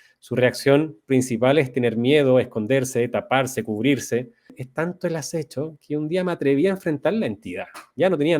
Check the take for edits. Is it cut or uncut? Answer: cut